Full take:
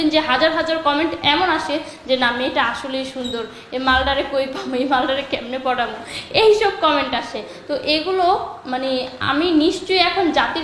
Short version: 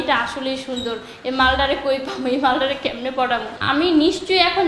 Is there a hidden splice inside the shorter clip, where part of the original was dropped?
yes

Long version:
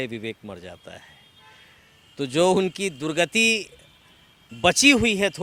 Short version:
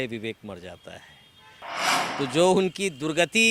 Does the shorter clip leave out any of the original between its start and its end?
no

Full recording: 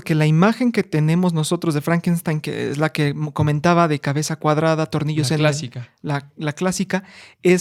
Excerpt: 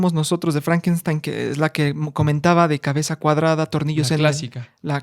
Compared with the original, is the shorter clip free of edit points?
yes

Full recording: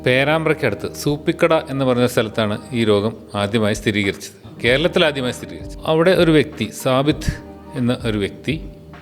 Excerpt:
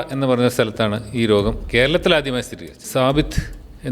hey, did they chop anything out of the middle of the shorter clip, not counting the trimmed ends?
yes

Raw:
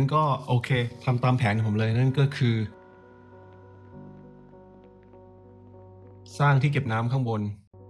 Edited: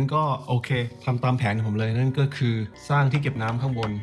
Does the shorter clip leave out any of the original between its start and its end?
yes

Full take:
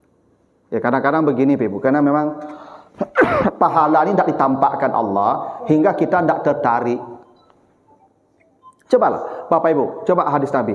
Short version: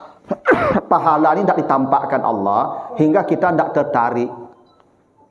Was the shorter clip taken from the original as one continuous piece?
yes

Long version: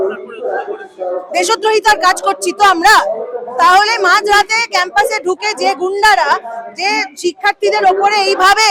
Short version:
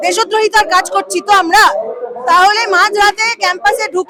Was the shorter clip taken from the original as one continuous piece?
yes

